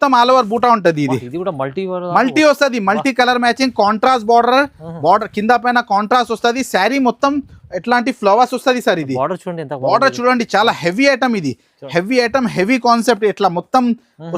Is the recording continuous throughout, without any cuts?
yes; 0 cuts

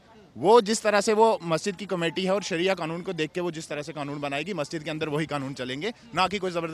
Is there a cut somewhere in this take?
no; 0 cuts

